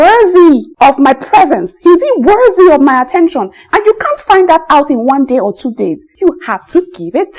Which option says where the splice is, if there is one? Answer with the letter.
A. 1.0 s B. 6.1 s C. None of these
B